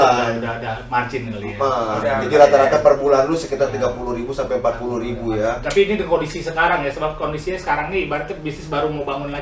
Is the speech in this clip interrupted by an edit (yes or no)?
no